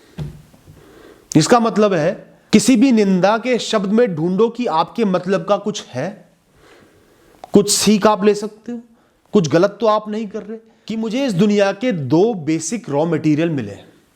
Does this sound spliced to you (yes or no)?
yes